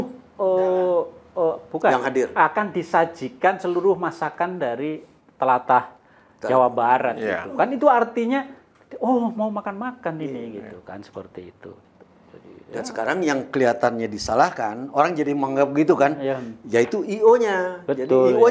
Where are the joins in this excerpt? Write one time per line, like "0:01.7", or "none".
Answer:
0:11.8